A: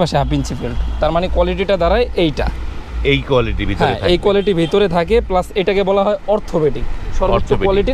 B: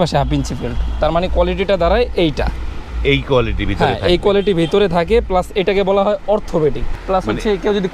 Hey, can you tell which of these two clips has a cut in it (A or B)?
B